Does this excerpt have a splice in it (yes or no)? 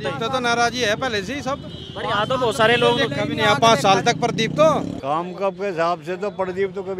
yes